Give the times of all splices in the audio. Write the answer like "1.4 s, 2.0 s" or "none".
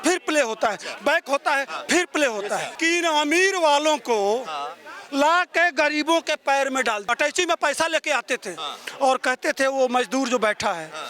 2.7 s, 7.1 s